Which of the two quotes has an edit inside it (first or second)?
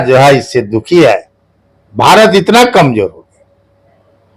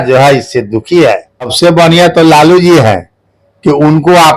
second